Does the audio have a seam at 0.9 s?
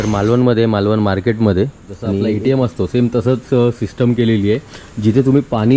no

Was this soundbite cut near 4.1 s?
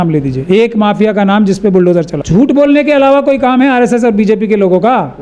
no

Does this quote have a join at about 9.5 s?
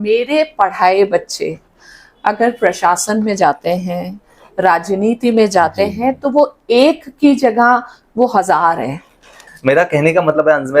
yes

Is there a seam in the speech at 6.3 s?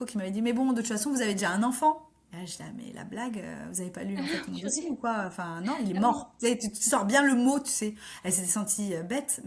no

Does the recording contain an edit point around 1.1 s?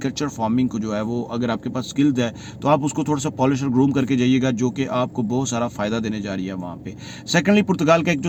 no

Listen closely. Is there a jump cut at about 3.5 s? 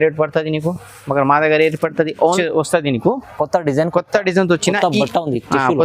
no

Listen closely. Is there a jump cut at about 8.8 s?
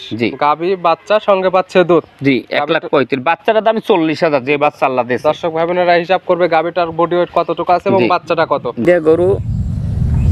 yes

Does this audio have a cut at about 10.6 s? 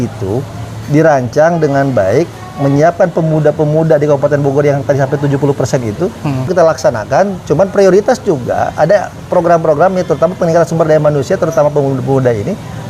no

